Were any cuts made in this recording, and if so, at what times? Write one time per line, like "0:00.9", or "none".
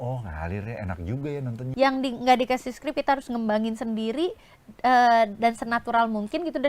0:01.6

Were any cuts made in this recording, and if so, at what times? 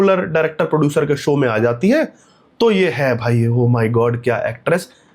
none

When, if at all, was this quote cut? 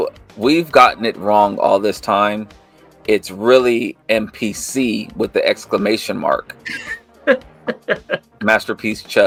none

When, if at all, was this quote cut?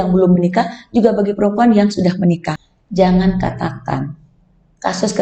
0:02.5

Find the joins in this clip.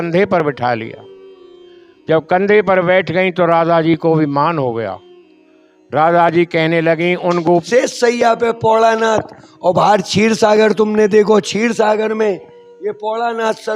0:07.6

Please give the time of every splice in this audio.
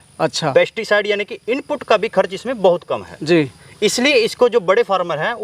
none

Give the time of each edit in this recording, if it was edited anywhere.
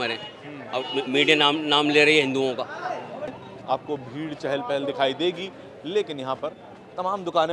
0:03.4

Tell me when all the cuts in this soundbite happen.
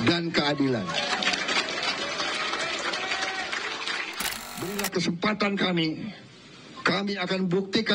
0:04.7

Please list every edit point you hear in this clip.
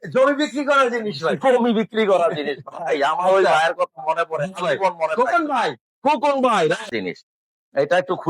0:06.9

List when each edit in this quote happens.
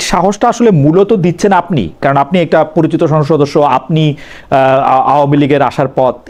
none

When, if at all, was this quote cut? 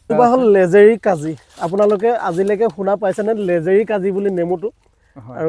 none

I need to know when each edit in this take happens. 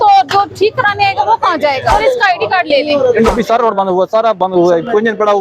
0:01.9
0:03.3

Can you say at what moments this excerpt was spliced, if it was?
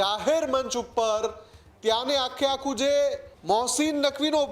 0:03.3

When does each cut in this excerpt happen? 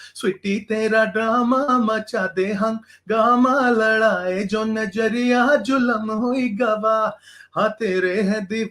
none

